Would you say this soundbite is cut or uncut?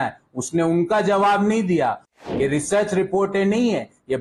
cut